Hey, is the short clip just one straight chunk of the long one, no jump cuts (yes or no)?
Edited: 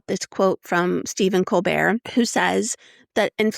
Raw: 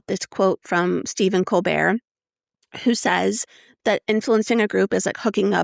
no